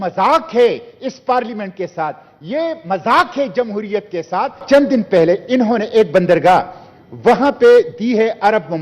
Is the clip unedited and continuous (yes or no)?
no